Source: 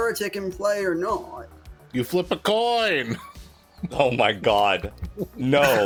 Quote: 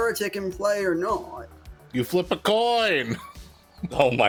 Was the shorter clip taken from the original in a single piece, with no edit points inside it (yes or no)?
yes